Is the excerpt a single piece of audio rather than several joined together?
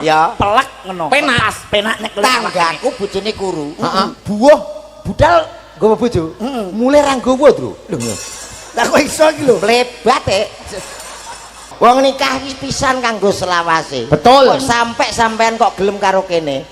no; 1 cut; at 11.7 s

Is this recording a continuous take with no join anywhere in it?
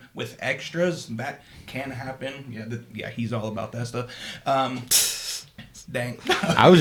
yes; 0 cuts

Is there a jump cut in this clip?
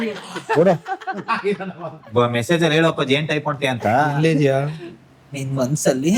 no; 0 cuts

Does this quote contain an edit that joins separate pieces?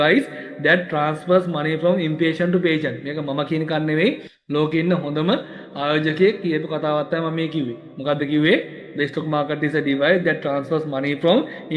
no; 0 cuts

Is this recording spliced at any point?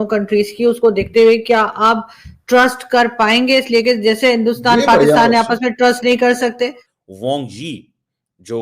yes; 1 cut; at 6.9 s

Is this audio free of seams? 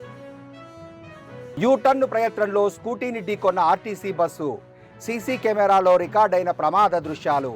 no; 1 cut; at 1.5 s

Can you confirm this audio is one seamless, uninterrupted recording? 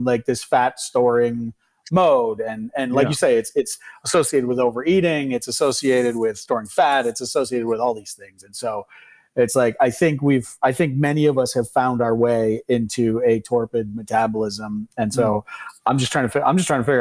yes; 0 cuts

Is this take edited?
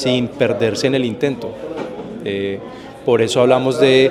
no; 0 cuts

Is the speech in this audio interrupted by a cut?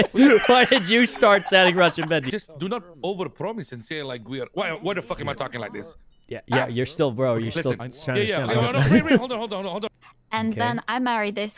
yes; 2 cuts; at 2.3 s, 9.9 s

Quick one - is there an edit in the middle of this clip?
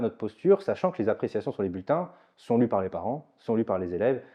no; 0 cuts

